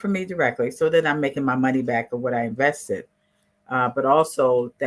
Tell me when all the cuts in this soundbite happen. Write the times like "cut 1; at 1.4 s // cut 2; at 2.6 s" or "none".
none